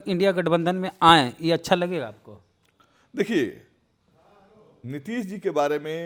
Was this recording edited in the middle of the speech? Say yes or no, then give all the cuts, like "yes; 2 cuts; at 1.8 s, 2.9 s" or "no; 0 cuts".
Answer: no; 0 cuts